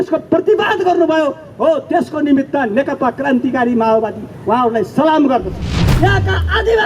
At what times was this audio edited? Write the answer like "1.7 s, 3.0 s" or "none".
5.8 s

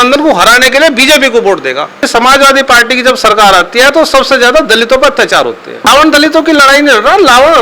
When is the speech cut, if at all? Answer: 2.0 s, 5.8 s

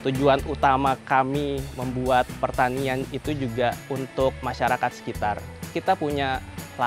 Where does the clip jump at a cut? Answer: 1.7 s, 2.4 s, 4.2 s, 5.7 s

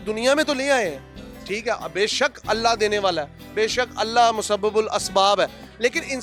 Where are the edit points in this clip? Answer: none

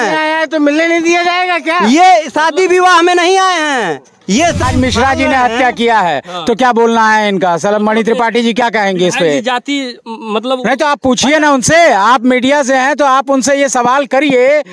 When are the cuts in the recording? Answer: 4.6 s

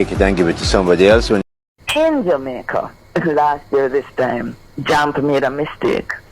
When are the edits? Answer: 1.4 s

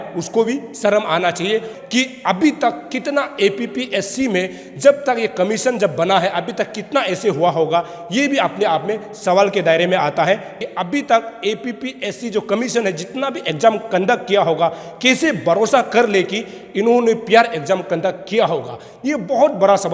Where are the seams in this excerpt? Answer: 1.7 s, 10.6 s

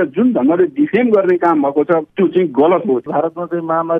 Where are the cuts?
2.1 s, 3.1 s

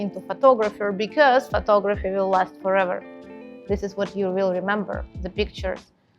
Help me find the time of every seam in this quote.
none

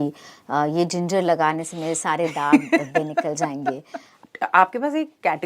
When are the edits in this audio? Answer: 4.2 s

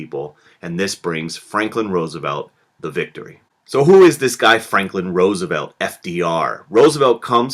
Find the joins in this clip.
2.9 s

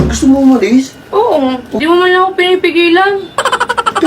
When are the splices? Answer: 1.7 s

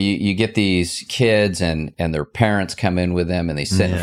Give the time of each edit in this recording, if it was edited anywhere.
1.0 s, 1.9 s

